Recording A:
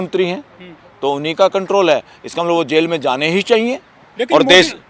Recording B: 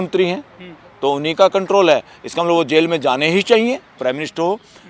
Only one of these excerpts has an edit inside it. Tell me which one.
B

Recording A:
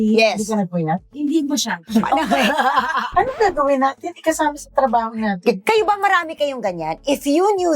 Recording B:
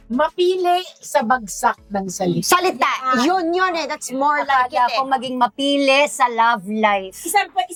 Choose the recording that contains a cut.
A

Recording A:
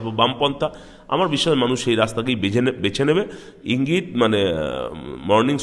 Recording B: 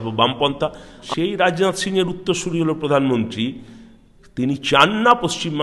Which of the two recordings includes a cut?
B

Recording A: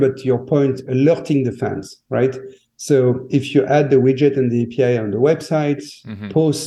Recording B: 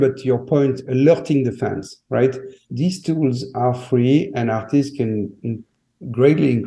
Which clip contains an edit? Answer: B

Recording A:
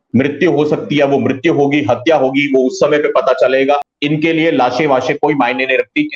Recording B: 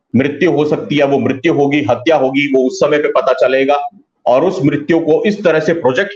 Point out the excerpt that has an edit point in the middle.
A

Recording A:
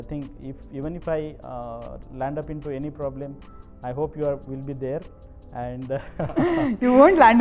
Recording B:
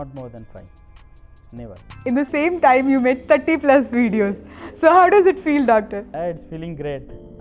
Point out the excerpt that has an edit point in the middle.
B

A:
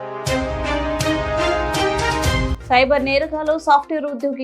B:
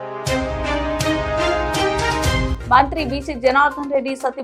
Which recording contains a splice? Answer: A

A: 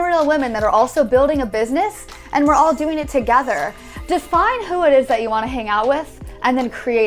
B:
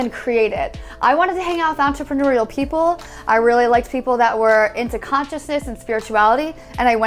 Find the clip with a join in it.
A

